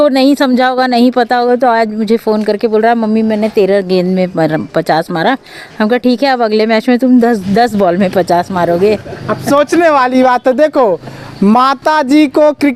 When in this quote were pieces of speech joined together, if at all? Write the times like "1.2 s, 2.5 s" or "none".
none